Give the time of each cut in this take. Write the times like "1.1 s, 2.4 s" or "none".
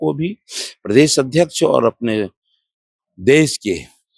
none